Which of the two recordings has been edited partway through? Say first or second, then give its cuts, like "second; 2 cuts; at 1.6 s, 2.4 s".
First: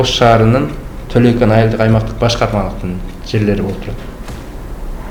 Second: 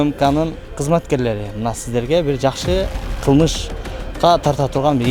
second; 1 cut; at 3.1 s